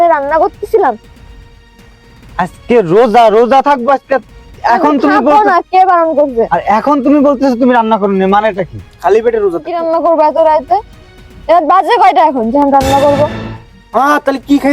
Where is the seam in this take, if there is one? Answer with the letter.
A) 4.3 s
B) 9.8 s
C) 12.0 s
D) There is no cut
B